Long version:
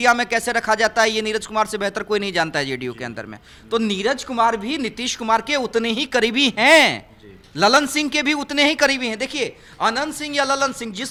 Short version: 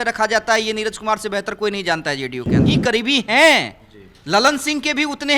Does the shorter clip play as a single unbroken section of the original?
no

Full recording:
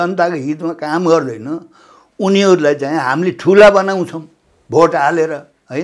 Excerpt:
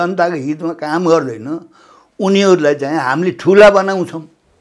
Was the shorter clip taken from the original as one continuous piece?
yes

